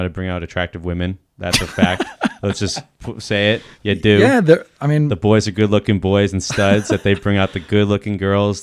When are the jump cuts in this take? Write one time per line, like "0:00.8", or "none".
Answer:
none